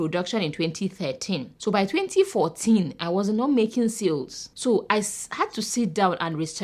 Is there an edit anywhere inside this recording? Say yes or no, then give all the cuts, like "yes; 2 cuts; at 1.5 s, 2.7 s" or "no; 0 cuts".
no; 0 cuts